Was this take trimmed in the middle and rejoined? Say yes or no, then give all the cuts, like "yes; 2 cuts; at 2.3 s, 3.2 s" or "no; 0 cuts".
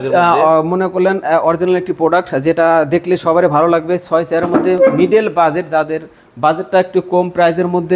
no; 0 cuts